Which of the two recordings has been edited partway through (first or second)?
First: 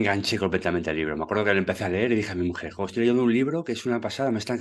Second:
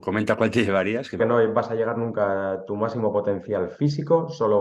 second